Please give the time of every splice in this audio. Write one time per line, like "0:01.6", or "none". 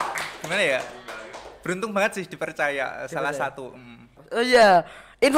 0:04.0